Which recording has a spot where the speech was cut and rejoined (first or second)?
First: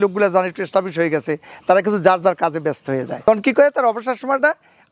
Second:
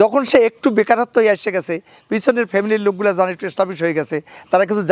first